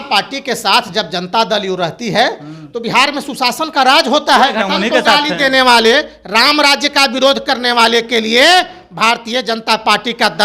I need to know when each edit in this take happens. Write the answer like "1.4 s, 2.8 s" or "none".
4.7 s